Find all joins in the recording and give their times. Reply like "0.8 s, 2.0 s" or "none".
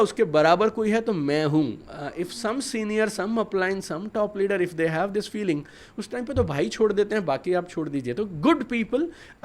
none